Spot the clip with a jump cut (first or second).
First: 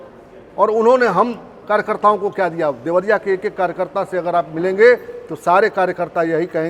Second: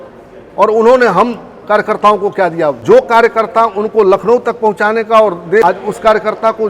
second